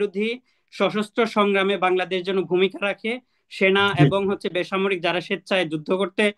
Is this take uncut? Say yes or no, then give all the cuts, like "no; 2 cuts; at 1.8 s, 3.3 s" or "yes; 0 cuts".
yes; 0 cuts